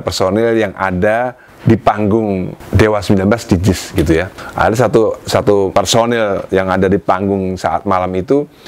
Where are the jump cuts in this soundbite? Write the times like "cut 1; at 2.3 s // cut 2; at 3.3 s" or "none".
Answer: cut 1; at 1.5 s // cut 2; at 2.6 s // cut 3; at 4.4 s // cut 4; at 5.7 s